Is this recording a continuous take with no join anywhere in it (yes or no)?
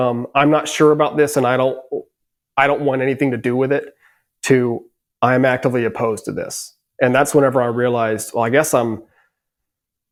yes